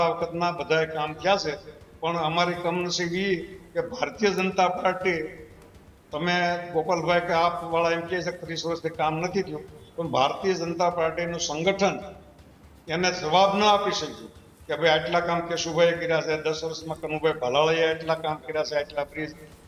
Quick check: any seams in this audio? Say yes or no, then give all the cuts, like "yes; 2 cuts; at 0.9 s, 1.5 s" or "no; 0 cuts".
no; 0 cuts